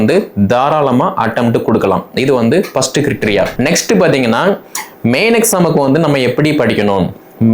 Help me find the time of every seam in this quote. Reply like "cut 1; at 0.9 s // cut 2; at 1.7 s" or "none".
cut 1; at 3.5 s